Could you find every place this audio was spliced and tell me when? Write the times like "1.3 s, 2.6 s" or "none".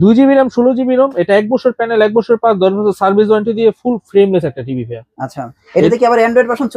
none